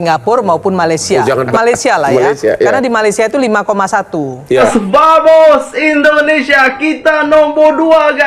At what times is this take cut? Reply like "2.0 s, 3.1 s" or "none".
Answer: 1.5 s, 4.7 s